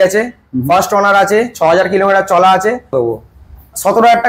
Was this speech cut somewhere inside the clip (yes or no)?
yes